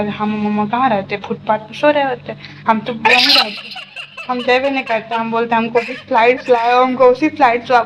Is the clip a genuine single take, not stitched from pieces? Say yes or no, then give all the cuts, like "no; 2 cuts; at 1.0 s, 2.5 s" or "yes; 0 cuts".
yes; 0 cuts